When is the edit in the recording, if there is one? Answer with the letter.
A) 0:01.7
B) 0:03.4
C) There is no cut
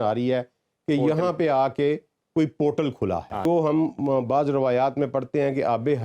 B